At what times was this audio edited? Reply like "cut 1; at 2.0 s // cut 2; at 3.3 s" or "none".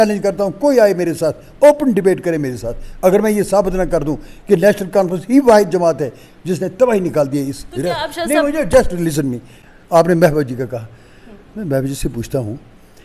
none